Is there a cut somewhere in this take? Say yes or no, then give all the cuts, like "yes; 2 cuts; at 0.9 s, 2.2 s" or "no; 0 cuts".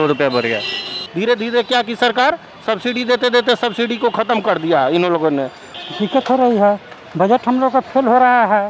yes; 2 cuts; at 1.0 s, 5.6 s